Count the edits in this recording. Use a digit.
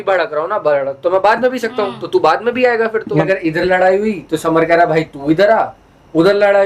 1